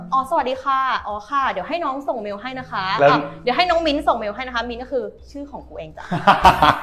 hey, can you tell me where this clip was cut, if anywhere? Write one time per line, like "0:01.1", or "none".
none